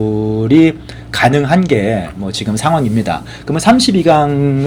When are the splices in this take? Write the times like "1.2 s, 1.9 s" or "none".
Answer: none